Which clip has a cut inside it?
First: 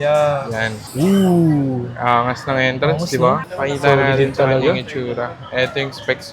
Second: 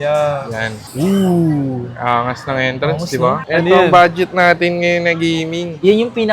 second; 1 cut; at 3.5 s

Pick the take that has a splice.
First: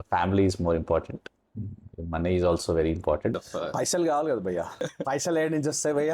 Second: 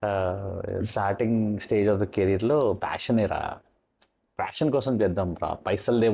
first; 2 cuts; at 3.4 s, 4.8 s

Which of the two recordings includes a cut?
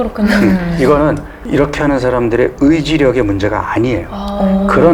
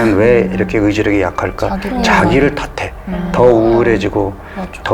first; 1 cut; at 1.3 s

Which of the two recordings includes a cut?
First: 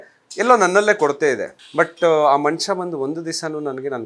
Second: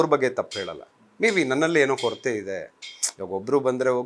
first; 1 cut; at 1.6 s

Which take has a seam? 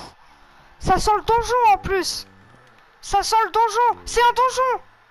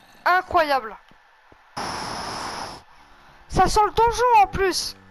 second; 1 cut; at 1.8 s

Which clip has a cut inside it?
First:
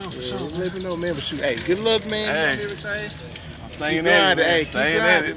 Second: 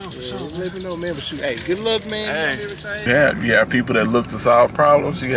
second; 1 cut; at 3.1 s

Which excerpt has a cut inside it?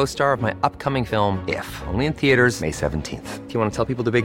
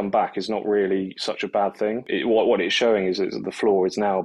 second; 1 cut; at 2.1 s

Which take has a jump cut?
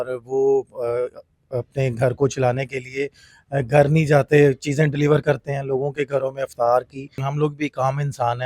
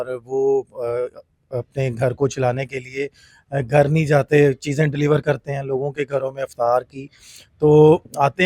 first; 1 cut; at 7.3 s

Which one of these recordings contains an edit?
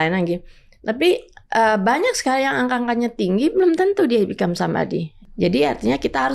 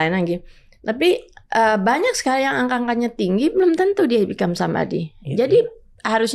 first; 1 cut; at 5.2 s

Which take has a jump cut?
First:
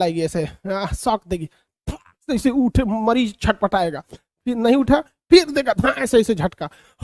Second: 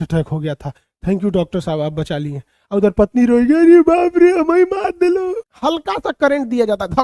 second; 1 cut; at 5.5 s

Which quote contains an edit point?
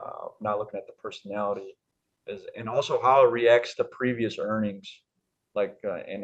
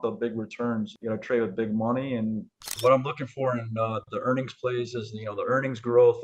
second; 2 cuts; at 0.9 s, 2.8 s

